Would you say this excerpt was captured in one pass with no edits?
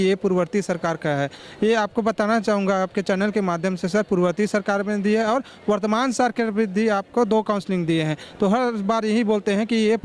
yes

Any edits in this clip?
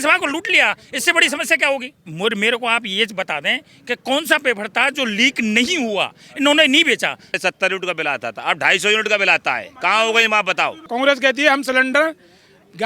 yes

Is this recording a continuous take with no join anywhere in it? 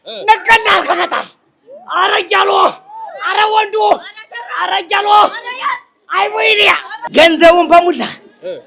no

